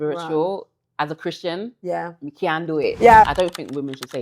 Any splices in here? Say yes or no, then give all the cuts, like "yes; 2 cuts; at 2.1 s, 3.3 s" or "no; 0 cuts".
yes; 1 cut; at 3.3 s